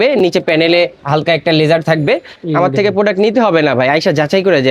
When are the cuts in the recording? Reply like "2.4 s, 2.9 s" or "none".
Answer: 1.0 s, 2.4 s